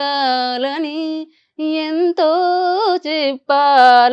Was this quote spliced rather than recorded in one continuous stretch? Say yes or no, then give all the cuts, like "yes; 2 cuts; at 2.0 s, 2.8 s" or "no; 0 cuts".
no; 0 cuts